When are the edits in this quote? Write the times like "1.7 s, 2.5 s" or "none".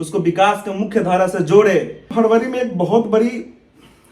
2.1 s